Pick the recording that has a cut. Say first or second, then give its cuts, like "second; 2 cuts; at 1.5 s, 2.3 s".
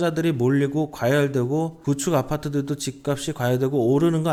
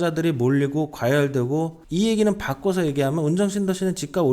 second; 1 cut; at 1.8 s